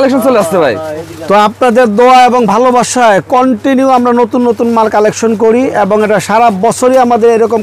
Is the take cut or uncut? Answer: uncut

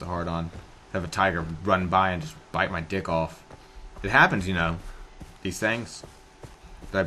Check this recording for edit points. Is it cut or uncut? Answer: uncut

